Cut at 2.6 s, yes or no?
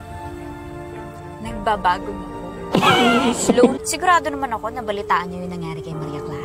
no